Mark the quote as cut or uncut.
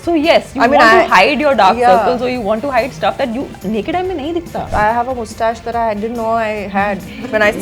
cut